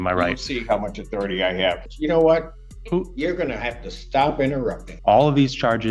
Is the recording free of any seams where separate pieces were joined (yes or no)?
no